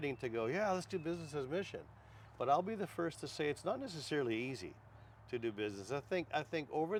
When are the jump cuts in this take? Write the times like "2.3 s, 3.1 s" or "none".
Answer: none